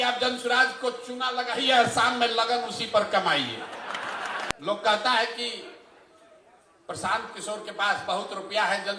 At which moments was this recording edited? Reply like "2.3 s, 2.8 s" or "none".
4.5 s